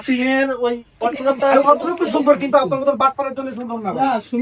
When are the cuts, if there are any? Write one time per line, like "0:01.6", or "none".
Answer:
none